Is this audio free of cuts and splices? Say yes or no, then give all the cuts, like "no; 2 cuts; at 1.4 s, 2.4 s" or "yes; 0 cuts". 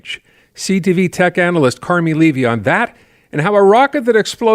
yes; 0 cuts